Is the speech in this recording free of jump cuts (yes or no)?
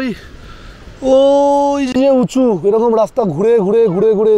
yes